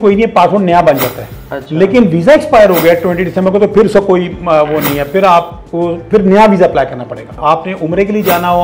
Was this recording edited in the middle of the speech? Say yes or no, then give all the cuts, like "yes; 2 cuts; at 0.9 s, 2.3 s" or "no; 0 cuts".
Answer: yes; 1 cut; at 7.3 s